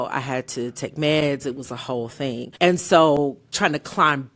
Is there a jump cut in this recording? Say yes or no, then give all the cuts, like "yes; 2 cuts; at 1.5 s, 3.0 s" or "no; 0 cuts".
yes; 1 cut; at 2.5 s